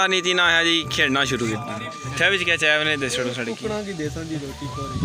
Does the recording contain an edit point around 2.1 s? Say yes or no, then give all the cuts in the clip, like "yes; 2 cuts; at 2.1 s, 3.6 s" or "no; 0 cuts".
yes; 1 cut; at 2.1 s